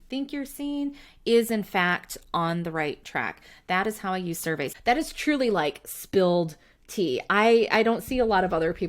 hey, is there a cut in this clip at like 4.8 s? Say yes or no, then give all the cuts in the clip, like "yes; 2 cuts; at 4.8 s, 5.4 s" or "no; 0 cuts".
yes; 1 cut; at 4.8 s